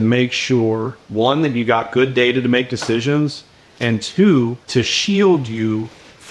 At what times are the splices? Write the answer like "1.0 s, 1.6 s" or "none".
1.0 s, 4.6 s